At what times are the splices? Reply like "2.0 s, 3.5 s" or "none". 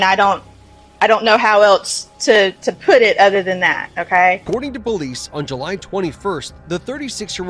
4.4 s